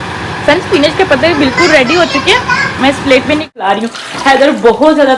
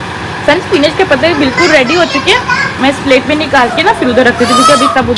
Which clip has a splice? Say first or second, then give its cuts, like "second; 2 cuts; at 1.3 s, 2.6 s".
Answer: first; 1 cut; at 3.5 s